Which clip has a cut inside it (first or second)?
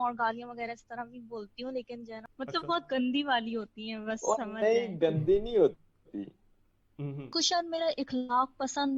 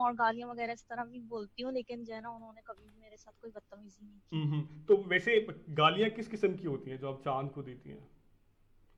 first